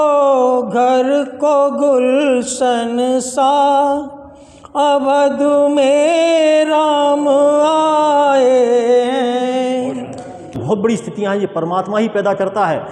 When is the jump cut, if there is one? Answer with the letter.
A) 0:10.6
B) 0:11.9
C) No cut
A